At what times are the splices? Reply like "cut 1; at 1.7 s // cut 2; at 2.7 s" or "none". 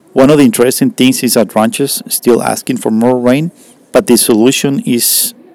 none